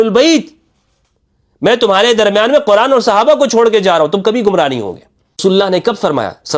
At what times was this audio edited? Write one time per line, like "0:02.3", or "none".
0:05.4